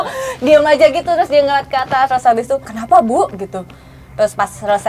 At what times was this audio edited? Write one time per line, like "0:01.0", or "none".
0:02.7